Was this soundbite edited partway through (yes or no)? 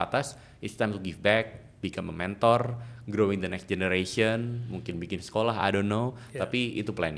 no